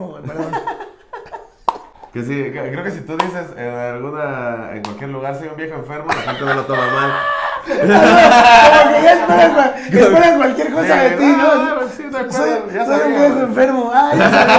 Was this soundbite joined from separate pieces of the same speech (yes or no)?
yes